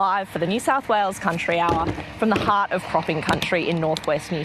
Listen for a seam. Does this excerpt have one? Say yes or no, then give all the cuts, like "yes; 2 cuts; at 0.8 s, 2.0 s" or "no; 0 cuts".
no; 0 cuts